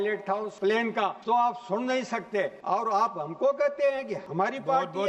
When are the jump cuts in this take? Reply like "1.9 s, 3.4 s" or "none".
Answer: 0.8 s, 2.6 s, 4.2 s